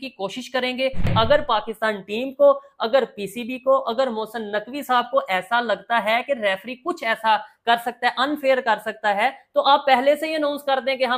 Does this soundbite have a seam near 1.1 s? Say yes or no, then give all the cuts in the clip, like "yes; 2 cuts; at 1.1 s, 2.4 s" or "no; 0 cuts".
yes; 1 cut; at 1.1 s